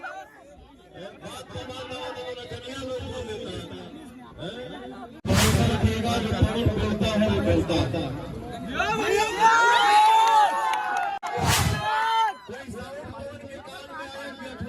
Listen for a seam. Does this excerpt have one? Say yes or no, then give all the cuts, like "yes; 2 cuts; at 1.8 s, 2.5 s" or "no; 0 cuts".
yes; 2 cuts; at 5.2 s, 11.2 s